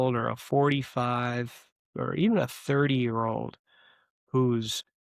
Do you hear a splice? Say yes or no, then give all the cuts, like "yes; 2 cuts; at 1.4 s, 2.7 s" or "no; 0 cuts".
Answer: no; 0 cuts